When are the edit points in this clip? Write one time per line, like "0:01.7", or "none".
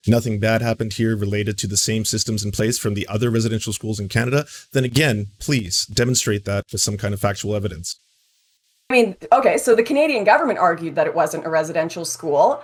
none